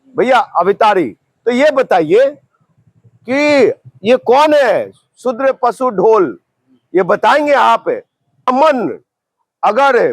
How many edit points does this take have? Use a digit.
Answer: 1